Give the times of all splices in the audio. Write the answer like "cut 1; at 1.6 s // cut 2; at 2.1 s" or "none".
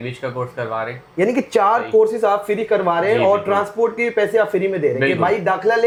none